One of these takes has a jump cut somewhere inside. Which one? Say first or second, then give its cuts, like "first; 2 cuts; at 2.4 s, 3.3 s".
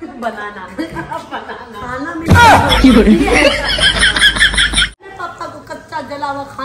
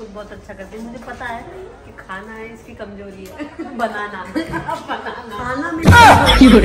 first; 1 cut; at 5.0 s